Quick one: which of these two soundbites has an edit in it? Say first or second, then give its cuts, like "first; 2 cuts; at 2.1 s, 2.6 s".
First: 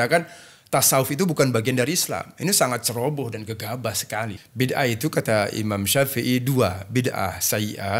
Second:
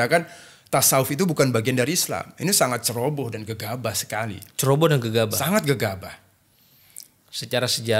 first; 1 cut; at 4.4 s